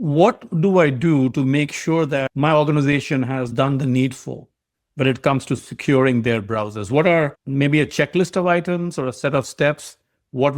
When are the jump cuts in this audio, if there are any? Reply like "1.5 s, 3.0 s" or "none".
2.3 s, 3.5 s